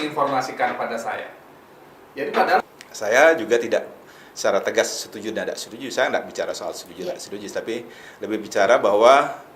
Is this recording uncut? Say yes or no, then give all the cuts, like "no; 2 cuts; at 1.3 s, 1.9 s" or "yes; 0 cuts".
no; 1 cut; at 2.6 s